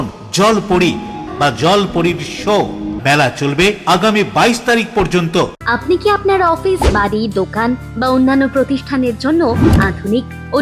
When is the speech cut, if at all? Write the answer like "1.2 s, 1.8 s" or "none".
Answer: 1.3 s, 2.9 s, 5.6 s